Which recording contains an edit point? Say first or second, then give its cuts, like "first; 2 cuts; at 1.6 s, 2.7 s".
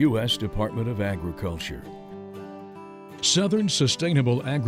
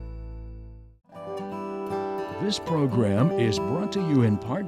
second; 2 cuts; at 1.2 s, 2.4 s